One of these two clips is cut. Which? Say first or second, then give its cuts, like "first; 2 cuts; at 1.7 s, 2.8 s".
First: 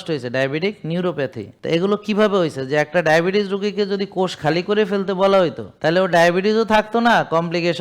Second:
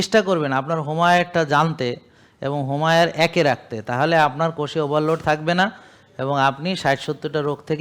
first; 2 cuts; at 1.5 s, 5.7 s